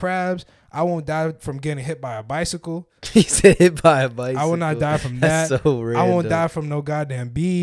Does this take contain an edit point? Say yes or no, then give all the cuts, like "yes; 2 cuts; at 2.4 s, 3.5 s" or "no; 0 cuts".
no; 0 cuts